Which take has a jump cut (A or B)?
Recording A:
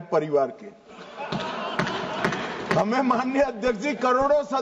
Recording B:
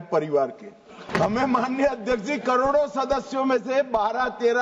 B